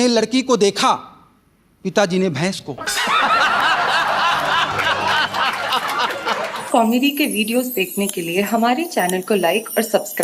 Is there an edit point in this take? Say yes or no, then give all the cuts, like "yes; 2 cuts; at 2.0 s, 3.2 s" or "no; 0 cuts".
yes; 1 cut; at 6.5 s